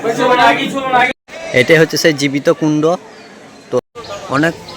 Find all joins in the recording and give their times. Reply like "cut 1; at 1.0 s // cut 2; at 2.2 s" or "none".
cut 1; at 1.2 s // cut 2; at 3.8 s